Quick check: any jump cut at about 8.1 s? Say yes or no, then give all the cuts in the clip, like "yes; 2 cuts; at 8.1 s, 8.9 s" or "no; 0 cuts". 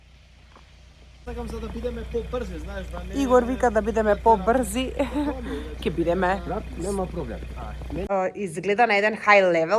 yes; 2 cuts; at 1.2 s, 8.1 s